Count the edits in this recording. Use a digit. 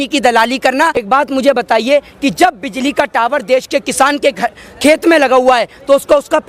1